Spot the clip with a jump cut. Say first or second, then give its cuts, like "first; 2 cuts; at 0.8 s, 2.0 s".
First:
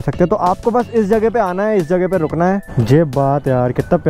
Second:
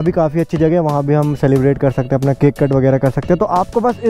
first; 1 cut; at 2.6 s